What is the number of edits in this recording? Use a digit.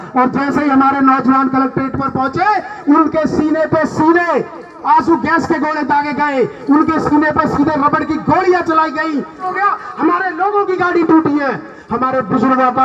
2